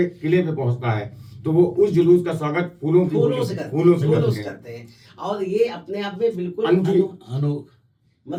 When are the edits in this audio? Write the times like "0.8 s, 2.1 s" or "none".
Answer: none